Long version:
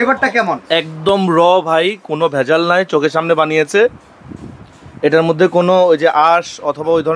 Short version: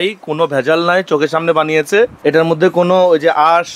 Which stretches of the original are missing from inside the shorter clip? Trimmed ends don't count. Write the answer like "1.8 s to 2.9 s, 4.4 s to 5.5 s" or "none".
4.0 s to 4.9 s